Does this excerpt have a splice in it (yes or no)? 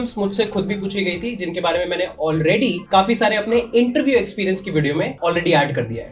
no